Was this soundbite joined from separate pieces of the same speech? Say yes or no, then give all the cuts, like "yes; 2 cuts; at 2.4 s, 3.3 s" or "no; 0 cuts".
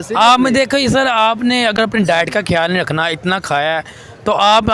no; 0 cuts